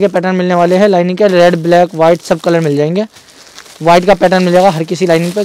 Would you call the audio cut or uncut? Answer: uncut